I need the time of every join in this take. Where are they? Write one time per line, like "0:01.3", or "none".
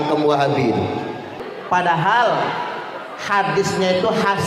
0:01.5